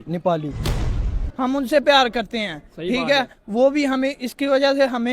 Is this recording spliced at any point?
yes; 1 cut; at 1.0 s

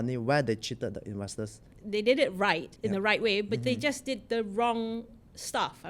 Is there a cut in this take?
yes; 2 cuts; at 1.7 s, 2.7 s

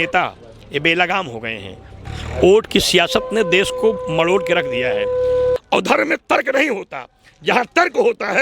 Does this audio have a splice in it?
yes; 2 cuts; at 2.1 s, 5.6 s

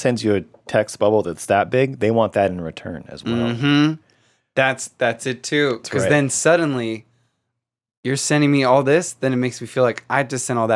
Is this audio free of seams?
yes; 0 cuts

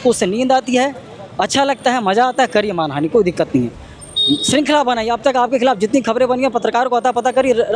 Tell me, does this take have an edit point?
no; 0 cuts

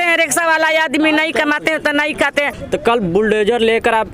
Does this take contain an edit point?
yes; 1 cut; at 2.6 s

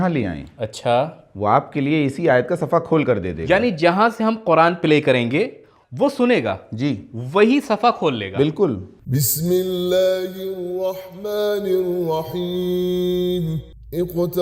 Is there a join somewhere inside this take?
yes; 1 cut; at 8.9 s

